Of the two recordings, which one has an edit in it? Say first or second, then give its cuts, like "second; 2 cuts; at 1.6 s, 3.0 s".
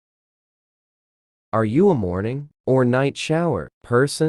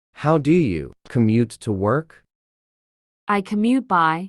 second; 1 cut; at 0.9 s